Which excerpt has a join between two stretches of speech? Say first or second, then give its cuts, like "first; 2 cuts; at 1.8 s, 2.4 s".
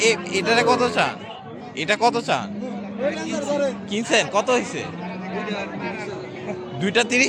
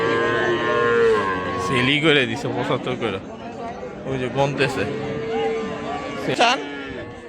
second; 1 cut; at 6.4 s